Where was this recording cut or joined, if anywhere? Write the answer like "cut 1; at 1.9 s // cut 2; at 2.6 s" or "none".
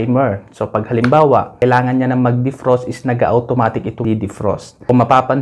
cut 1; at 1.5 s // cut 2; at 4.2 s

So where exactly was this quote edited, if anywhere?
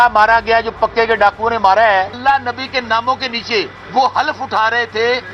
cut 1; at 2.2 s // cut 2; at 3.8 s

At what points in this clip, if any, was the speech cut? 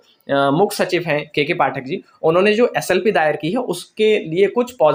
none

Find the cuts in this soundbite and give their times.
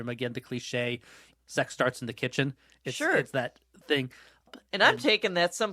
cut 1; at 4.5 s

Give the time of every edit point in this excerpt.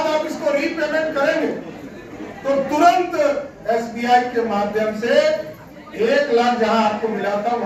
none

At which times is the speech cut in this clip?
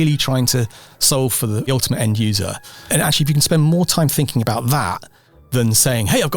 cut 1; at 1.7 s // cut 2; at 2.9 s

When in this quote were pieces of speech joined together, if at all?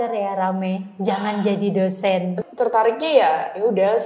cut 1; at 2.4 s

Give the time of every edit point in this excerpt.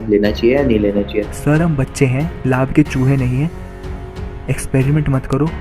cut 1; at 1.3 s

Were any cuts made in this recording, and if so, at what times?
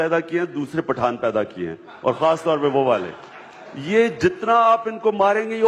none

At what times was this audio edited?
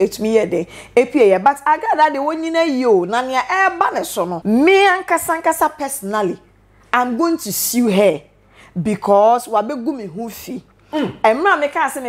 cut 1; at 4.4 s

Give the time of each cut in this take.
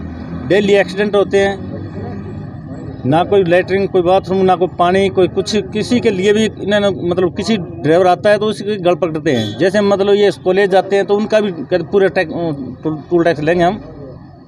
none

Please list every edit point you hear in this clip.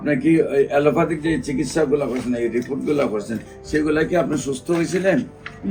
none

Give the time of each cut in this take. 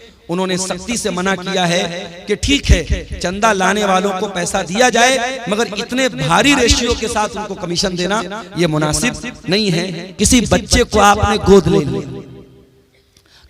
cut 1; at 10.0 s

